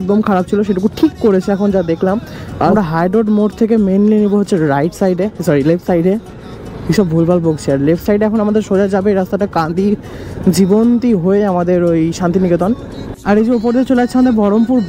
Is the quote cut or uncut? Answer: cut